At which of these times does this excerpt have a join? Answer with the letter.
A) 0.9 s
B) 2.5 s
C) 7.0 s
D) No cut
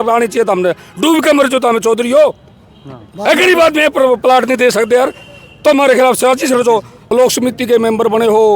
C